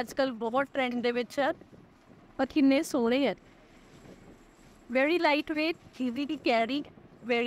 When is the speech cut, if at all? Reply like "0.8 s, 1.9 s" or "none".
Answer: none

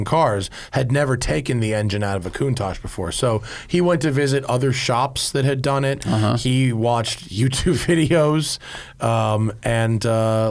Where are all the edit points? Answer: none

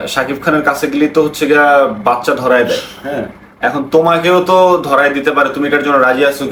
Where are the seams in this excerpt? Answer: none

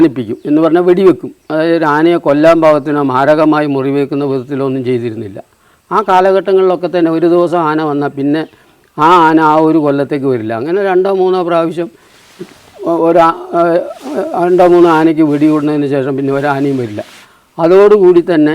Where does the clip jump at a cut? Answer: none

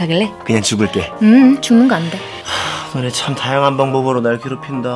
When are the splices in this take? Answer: 0.9 s

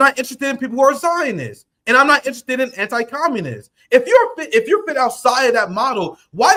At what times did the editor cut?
none

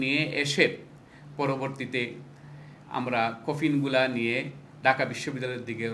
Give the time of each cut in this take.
none

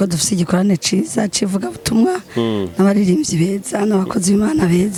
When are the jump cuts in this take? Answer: none

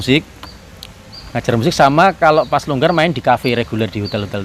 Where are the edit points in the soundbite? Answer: none

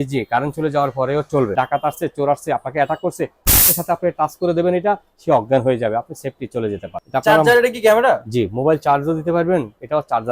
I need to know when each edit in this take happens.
1.5 s, 6.9 s

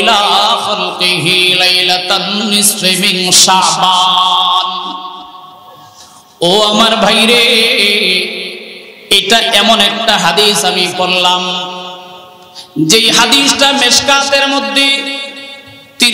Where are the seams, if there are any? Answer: none

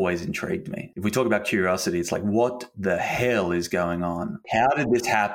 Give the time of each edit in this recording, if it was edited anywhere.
0.9 s, 4.5 s

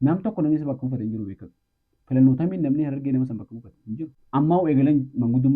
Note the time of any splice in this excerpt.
4.1 s

